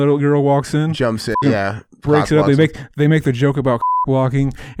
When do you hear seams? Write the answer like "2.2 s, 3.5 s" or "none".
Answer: none